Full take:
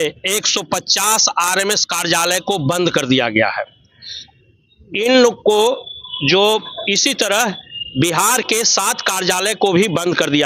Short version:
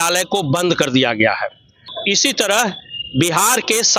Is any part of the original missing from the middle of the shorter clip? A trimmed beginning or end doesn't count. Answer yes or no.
yes